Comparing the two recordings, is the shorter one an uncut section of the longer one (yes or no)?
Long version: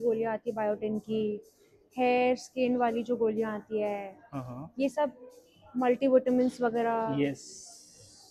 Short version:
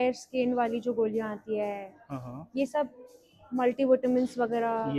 yes